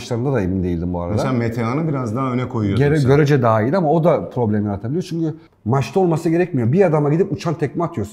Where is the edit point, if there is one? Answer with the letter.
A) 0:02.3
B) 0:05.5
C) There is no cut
B